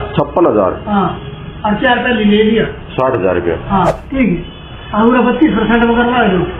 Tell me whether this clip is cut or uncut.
cut